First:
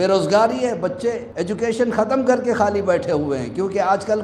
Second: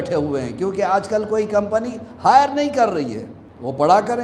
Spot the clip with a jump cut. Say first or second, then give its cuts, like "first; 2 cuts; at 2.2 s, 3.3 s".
first; 1 cut; at 1.3 s